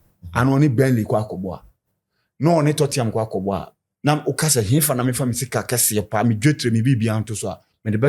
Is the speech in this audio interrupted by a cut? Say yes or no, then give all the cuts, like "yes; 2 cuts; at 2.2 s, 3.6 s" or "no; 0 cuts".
no; 0 cuts